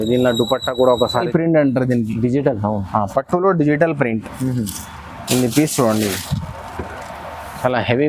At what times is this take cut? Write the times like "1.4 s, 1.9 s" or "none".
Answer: 1.3 s